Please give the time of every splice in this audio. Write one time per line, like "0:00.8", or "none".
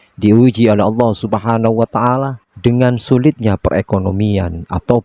none